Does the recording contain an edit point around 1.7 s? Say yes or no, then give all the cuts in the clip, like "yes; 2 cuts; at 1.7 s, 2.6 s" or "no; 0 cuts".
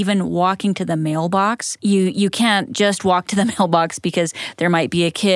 yes; 1 cut; at 1.7 s